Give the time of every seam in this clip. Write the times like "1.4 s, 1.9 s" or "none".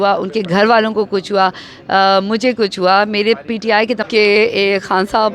4.1 s